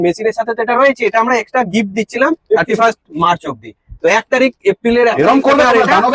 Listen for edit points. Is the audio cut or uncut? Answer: uncut